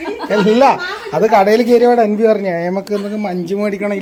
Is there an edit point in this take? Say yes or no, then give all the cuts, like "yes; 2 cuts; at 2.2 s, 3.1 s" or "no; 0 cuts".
no; 0 cuts